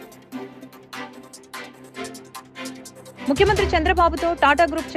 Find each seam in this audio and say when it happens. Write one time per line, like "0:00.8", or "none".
0:01.3